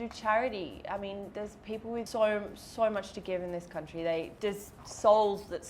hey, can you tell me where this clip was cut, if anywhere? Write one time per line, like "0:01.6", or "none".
0:02.1
0:04.3